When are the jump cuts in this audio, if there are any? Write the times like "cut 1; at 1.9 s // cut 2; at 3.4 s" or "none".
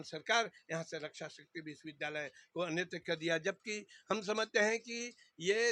none